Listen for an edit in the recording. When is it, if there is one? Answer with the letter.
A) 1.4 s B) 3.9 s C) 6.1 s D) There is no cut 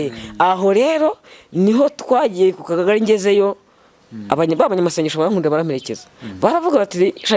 D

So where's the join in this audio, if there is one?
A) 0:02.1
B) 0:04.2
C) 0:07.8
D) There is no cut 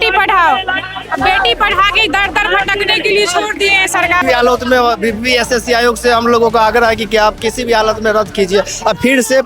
B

